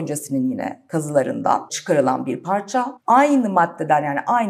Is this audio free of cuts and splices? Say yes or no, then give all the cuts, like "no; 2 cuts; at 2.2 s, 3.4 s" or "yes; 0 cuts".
no; 2 cuts; at 1.7 s, 3.0 s